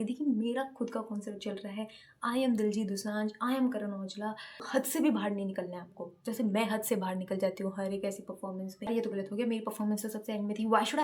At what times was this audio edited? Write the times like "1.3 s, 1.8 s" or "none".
4.6 s, 8.9 s